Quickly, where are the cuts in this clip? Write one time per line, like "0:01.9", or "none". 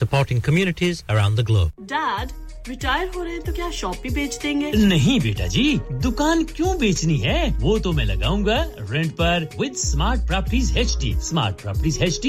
0:01.8